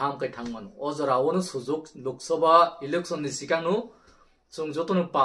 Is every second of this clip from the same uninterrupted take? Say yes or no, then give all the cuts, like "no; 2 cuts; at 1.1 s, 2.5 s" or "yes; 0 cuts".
yes; 0 cuts